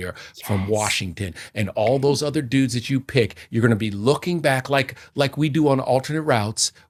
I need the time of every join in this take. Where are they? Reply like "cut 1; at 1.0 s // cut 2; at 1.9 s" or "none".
none